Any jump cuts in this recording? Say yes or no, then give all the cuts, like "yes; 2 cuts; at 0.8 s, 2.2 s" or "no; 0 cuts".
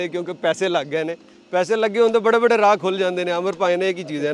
no; 0 cuts